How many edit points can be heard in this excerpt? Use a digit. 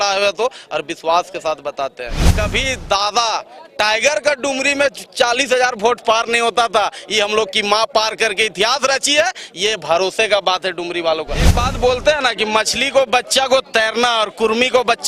2